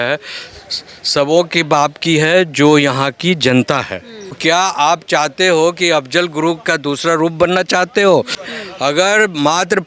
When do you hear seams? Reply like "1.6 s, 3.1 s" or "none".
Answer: 4.4 s, 8.4 s